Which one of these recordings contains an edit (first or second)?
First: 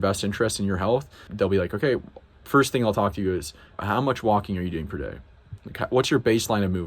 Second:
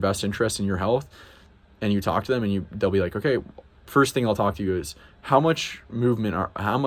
first